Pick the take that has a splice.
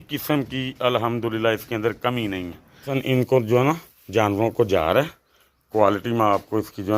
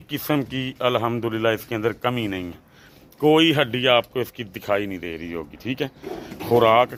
first; 1 cut; at 2.9 s

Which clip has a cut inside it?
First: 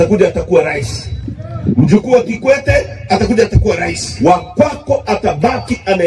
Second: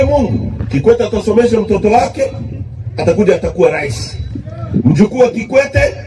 first; 1 cut; at 4.0 s

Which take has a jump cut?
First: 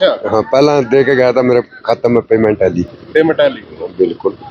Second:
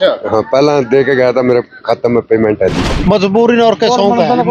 second; 1 cut; at 2.9 s

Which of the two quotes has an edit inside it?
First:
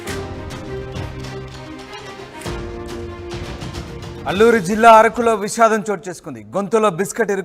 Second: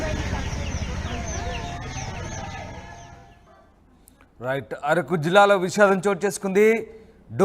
second; 1 cut; at 1.8 s

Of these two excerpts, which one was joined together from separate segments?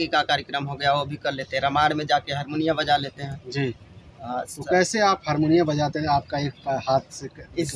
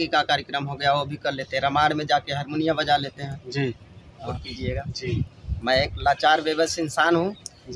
second; 1 cut; at 4.2 s

